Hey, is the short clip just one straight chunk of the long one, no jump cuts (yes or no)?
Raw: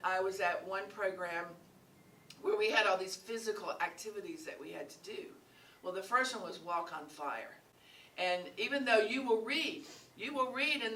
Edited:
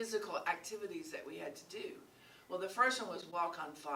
yes